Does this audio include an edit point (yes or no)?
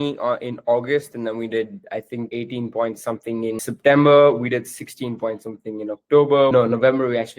yes